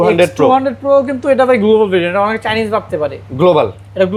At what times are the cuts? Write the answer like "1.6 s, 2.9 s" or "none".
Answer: none